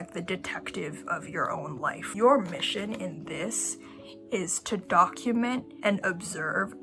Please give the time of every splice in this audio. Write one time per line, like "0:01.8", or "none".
0:02.1
0:05.7